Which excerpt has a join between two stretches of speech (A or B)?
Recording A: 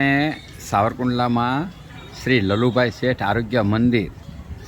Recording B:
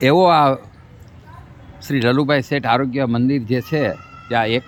A